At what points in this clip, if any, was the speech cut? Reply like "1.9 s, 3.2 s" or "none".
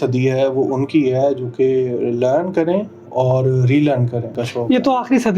4.4 s